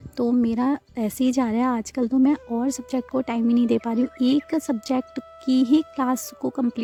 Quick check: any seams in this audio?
no; 0 cuts

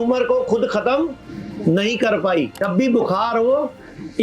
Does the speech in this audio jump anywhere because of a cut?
yes; 1 cut; at 2.6 s

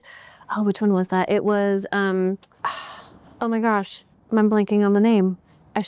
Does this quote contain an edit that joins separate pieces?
yes; 1 cut; at 2.5 s

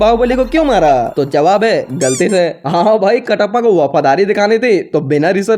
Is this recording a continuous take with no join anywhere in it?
no; 1 cut; at 1.1 s

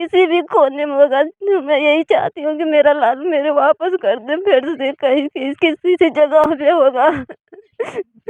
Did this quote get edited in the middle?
no; 0 cuts

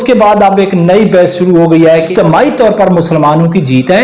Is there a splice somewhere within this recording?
yes; 1 cut; at 2.1 s

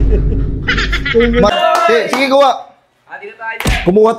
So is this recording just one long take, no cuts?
no; 1 cut; at 1.5 s

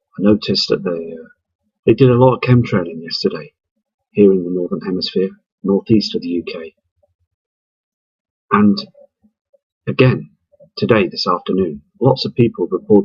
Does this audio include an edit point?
no; 0 cuts

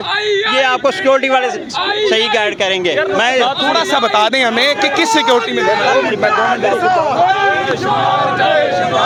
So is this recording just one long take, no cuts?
yes; 0 cuts

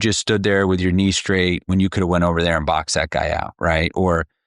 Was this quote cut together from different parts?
no; 0 cuts

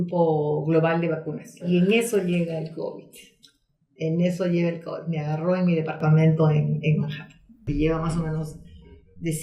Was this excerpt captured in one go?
no; 2 cuts; at 1.6 s, 7.7 s

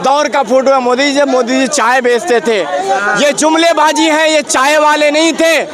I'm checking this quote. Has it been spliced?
no; 0 cuts

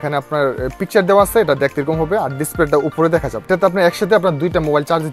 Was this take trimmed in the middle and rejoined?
yes; 1 cut; at 3.5 s

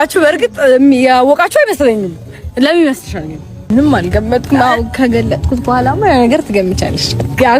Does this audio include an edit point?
yes; 1 cut; at 3.7 s

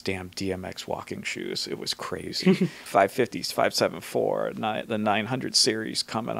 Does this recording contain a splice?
yes; 1 cut; at 2.8 s

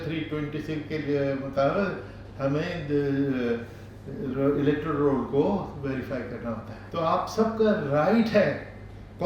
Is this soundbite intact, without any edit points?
no; 1 cut; at 6.7 s

